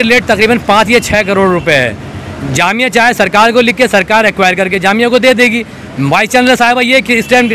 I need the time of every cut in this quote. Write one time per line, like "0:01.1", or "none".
none